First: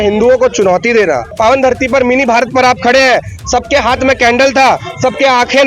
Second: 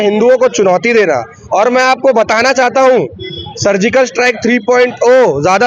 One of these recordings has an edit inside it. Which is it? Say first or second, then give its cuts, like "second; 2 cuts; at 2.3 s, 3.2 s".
first; 1 cut; at 1.3 s